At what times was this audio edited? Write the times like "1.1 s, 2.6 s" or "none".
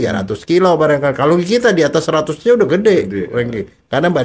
none

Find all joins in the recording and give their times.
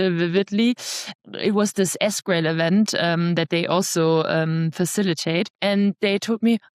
1.1 s, 5.5 s

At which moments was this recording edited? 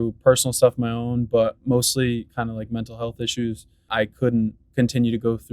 3.9 s

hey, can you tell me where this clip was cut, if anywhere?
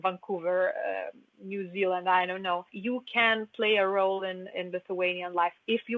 2.7 s

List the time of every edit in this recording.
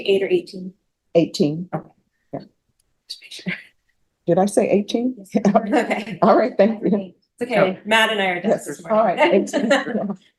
none

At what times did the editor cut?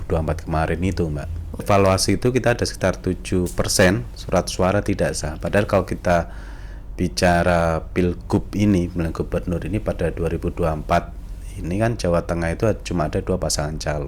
1.6 s

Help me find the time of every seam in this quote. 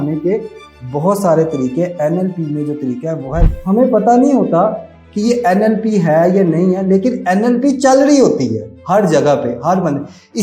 3.5 s

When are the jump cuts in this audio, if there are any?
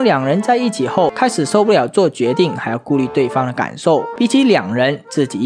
1.1 s, 4.1 s

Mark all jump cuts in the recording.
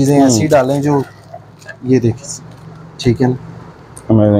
none

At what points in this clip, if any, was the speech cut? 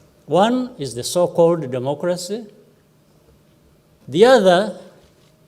3.9 s

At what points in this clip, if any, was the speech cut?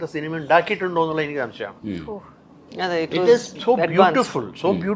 none

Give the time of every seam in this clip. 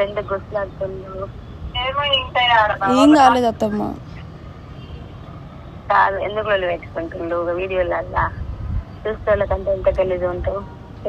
none

